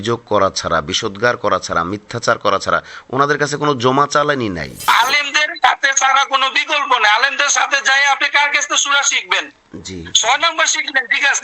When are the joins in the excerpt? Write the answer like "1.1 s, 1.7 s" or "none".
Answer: 4.9 s